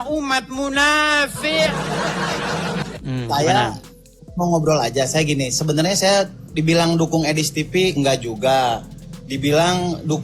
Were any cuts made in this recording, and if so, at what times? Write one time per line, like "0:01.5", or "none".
0:02.9